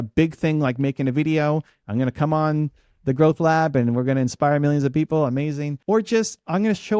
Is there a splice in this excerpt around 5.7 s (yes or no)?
yes